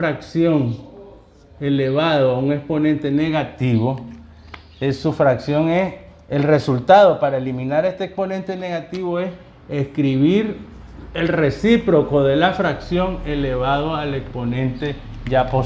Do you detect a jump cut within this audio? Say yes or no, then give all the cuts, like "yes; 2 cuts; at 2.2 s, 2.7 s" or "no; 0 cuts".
no; 0 cuts